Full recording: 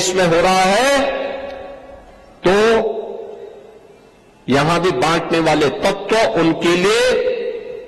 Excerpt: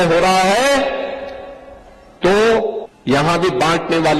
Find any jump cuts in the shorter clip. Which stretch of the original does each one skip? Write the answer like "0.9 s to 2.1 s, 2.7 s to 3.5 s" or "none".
3.1 s to 4.3 s

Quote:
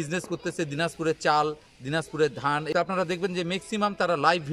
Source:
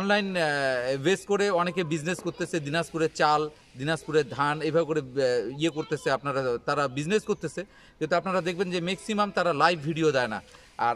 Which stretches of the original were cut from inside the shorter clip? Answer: 4.7 s to 8.1 s

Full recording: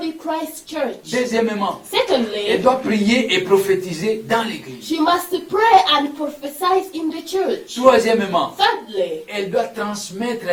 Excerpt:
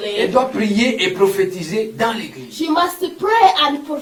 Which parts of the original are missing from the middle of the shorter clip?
none

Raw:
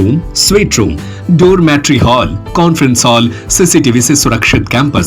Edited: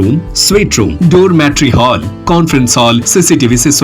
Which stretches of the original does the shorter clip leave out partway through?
0.9 s to 1.2 s, 3.3 s to 3.5 s

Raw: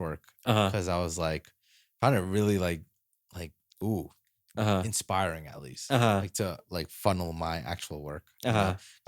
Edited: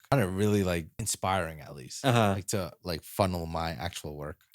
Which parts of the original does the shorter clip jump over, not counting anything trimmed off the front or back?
3.0 s to 4.9 s

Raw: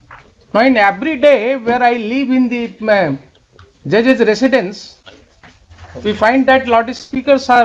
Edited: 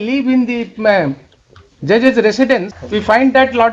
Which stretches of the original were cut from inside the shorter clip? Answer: 4.8 s to 5.9 s

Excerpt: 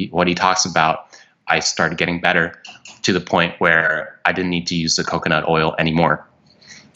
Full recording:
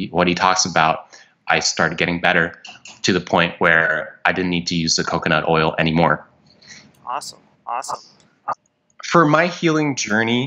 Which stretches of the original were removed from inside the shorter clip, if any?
none

